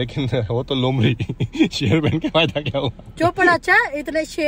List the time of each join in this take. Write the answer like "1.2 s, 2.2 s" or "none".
1.9 s